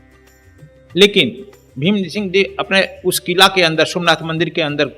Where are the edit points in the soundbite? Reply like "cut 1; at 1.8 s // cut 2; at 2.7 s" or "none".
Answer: cut 1; at 0.9 s